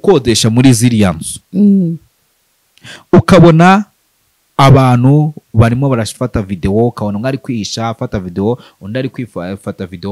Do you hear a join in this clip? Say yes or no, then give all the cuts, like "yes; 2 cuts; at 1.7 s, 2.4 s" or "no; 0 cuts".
no; 0 cuts